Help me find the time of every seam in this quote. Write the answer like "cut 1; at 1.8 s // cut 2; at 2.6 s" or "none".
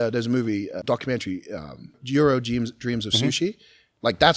cut 1; at 0.8 s // cut 2; at 2.0 s